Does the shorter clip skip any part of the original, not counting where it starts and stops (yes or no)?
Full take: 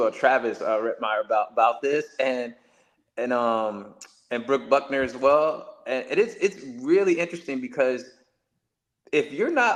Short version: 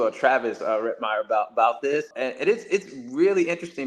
yes